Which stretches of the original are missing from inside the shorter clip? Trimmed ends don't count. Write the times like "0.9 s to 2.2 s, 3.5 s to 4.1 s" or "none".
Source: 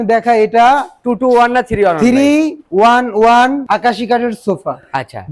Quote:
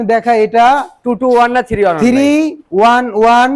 none